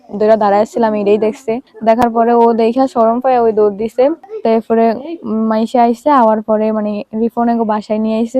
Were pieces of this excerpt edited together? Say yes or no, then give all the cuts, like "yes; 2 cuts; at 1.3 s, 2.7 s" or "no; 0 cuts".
yes; 2 cuts; at 1.7 s, 4.3 s